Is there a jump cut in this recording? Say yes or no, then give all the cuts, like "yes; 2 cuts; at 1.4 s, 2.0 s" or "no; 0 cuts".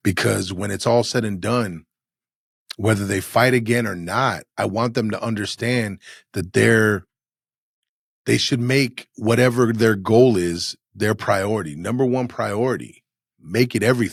no; 0 cuts